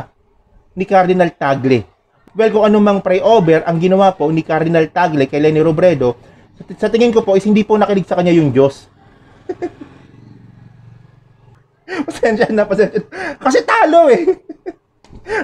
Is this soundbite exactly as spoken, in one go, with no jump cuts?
yes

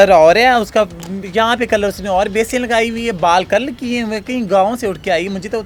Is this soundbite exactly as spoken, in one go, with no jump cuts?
yes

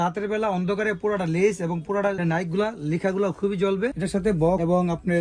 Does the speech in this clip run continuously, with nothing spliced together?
no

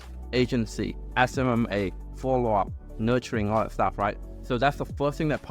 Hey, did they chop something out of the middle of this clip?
no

